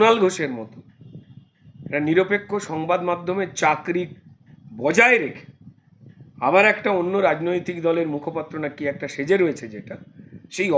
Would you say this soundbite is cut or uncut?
uncut